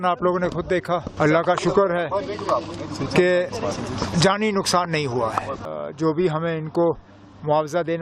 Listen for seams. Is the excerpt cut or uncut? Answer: cut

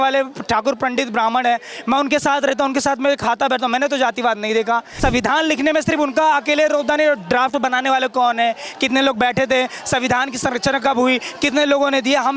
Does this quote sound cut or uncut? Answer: cut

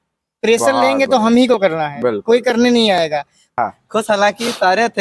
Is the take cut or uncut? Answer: cut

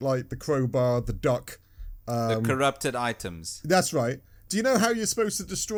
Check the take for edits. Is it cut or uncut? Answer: uncut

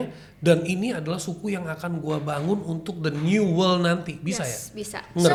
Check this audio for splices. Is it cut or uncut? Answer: uncut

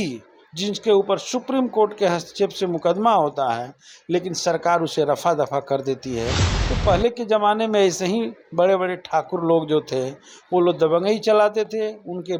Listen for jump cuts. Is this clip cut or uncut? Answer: uncut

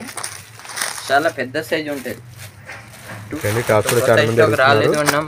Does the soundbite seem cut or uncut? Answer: cut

